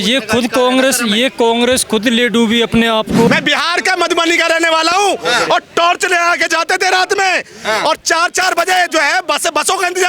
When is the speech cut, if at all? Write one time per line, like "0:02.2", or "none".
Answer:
0:03.3

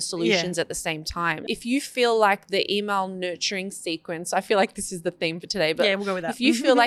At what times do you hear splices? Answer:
0:01.4

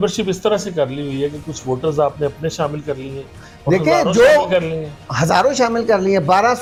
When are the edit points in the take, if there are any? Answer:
none

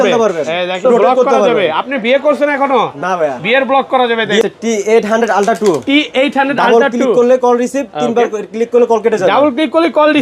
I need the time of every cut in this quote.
0:00.8
0:04.4

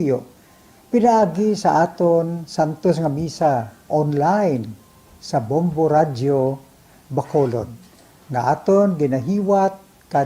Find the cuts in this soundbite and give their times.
none

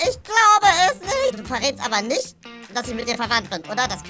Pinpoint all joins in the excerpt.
0:01.3

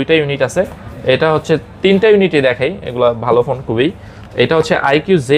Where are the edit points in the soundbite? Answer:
none

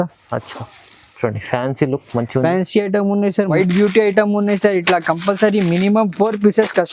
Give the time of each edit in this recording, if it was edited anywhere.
0:03.5

